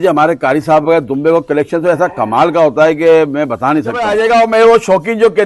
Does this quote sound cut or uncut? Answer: cut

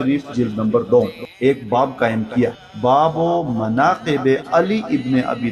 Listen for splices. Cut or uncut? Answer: cut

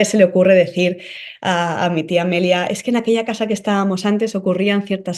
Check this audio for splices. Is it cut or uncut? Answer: uncut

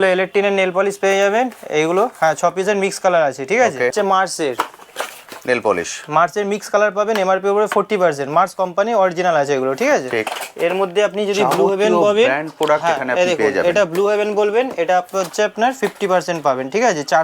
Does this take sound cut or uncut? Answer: cut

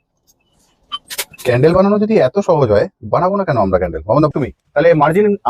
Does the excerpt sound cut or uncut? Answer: cut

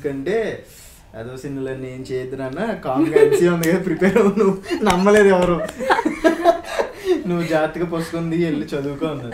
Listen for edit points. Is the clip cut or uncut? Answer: uncut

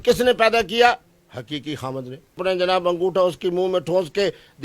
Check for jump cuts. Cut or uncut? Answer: cut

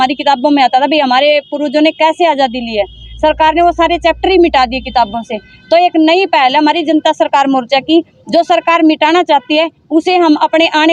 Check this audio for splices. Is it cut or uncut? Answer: uncut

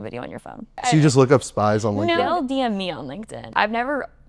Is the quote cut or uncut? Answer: cut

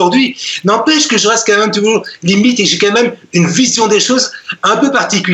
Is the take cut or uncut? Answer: uncut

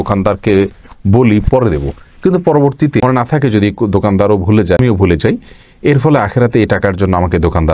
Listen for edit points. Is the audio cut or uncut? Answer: cut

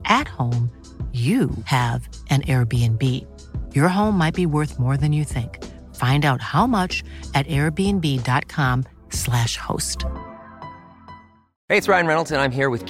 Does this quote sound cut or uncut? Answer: uncut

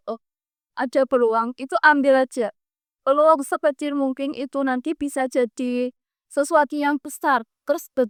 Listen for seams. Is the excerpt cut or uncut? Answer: uncut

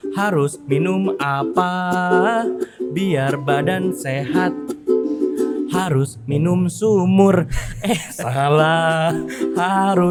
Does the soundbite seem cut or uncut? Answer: uncut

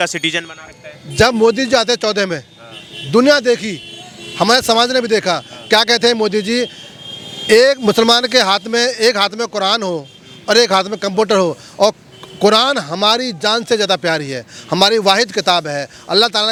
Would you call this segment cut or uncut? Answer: uncut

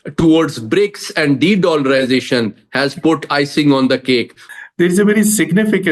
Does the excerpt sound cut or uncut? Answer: cut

